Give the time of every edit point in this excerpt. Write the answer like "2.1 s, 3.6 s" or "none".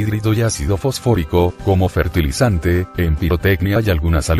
none